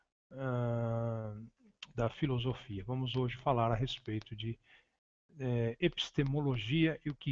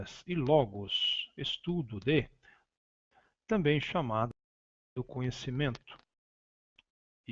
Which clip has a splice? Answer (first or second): first